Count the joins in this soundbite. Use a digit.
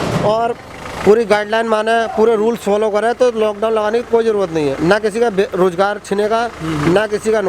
0